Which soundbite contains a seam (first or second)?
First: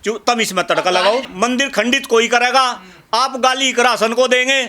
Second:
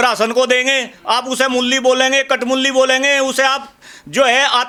first